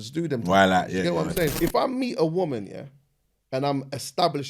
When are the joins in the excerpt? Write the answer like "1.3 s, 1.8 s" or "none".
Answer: 1.5 s